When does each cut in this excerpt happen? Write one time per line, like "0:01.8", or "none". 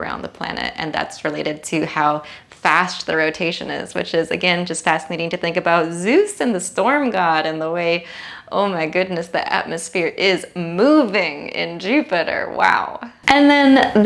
none